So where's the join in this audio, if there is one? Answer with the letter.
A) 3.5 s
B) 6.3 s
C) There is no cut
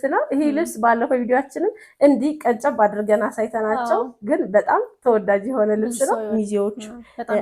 B